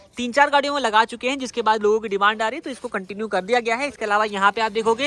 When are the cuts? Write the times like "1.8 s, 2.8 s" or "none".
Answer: none